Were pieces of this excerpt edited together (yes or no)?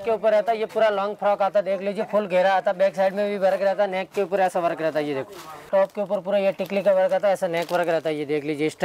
yes